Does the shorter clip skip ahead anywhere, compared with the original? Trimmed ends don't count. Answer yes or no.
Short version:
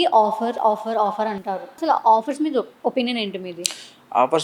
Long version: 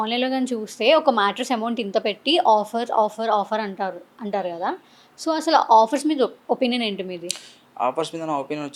yes